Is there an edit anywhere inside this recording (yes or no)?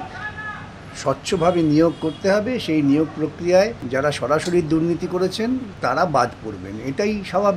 yes